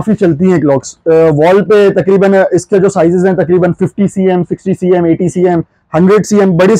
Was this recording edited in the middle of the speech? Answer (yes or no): no